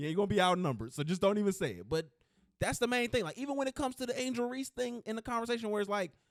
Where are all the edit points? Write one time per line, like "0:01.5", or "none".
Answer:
none